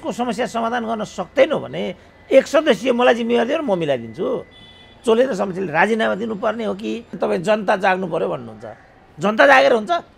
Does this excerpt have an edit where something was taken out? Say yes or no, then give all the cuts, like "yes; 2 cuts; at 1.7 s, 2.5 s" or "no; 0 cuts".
yes; 1 cut; at 7.1 s